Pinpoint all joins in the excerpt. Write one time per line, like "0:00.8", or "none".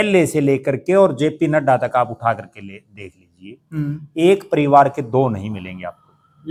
none